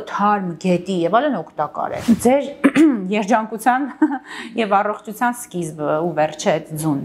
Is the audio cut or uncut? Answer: cut